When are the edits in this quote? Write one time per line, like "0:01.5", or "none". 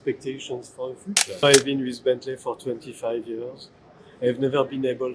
0:01.4

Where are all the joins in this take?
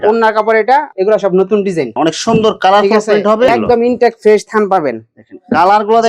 0:03.5

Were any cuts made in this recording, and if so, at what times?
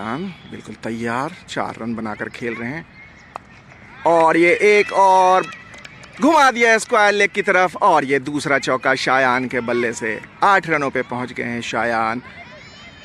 none

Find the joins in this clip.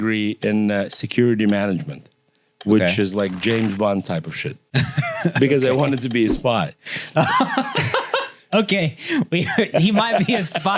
0:04.7

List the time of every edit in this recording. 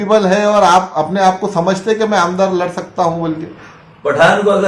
none

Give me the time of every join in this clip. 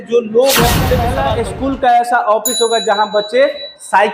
0:01.1

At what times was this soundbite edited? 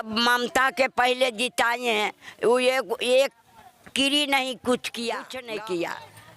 0:05.4

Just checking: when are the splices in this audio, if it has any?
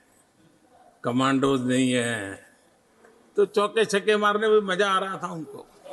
none

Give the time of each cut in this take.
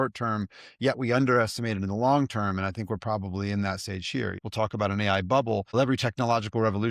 0:04.4
0:05.7

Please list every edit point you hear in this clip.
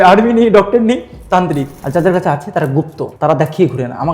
0:01.8
0:03.0

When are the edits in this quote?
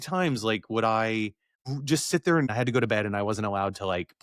0:01.5
0:02.5

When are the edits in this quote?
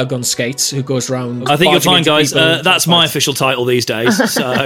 0:01.5

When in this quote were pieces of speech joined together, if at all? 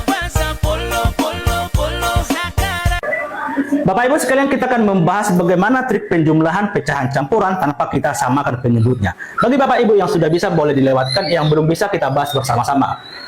0:03.0

